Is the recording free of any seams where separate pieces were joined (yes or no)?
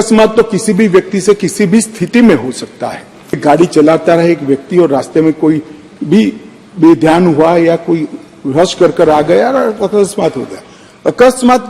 no